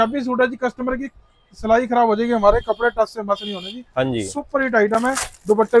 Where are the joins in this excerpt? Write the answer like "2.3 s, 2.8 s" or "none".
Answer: none